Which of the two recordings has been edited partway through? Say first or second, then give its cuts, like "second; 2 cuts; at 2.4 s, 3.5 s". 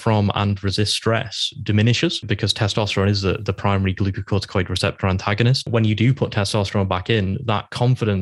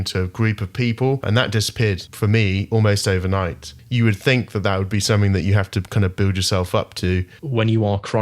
second; 3 cuts; at 1.2 s, 3.7 s, 7.4 s